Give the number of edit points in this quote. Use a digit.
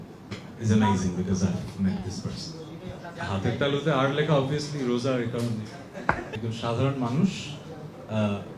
2